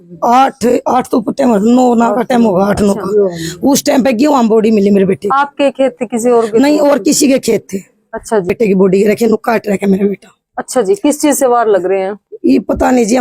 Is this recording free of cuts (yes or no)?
no